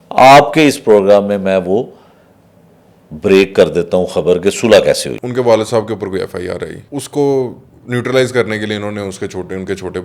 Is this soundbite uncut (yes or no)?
no